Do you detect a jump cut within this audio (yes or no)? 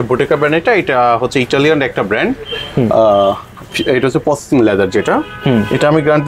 no